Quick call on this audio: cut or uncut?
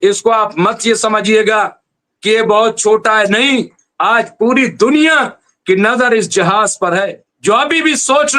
cut